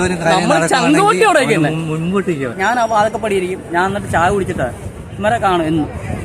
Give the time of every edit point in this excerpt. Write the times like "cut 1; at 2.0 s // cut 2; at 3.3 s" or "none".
cut 1; at 2.6 s